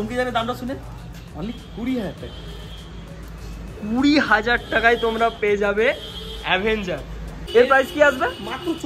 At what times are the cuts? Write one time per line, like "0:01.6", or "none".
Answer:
0:07.1